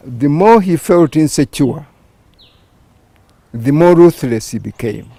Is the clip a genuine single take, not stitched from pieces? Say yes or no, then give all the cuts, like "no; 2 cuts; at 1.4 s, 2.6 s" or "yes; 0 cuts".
yes; 0 cuts